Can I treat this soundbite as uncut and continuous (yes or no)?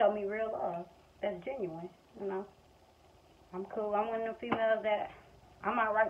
yes